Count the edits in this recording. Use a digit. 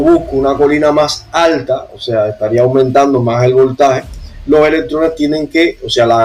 0